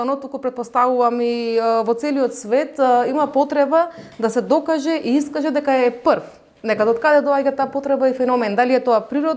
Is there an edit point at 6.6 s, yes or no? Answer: no